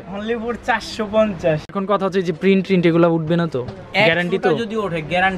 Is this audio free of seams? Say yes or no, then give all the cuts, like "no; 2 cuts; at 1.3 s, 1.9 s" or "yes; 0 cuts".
no; 1 cut; at 1.7 s